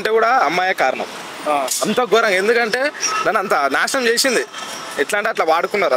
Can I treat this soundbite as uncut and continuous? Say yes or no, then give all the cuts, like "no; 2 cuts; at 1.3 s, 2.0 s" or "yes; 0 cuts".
yes; 0 cuts